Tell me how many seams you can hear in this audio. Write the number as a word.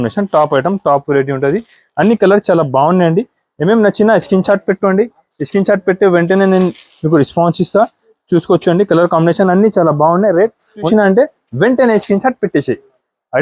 one